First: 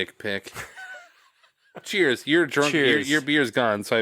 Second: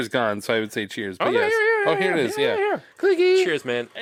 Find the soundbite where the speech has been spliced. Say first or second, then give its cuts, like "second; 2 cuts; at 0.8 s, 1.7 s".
first; 1 cut; at 1.8 s